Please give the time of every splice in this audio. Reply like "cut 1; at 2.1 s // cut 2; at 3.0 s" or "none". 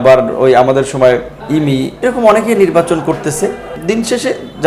cut 1; at 1.3 s // cut 2; at 3.7 s